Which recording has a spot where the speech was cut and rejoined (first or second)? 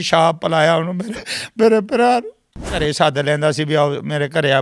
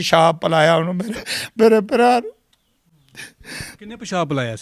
first